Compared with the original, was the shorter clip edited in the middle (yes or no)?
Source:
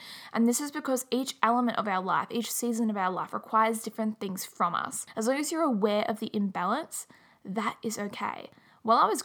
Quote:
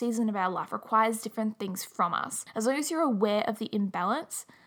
no